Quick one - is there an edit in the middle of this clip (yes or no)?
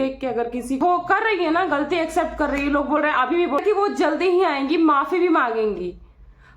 yes